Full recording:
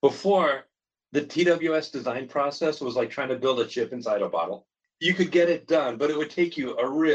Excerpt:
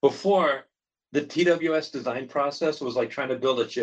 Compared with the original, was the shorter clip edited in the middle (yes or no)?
no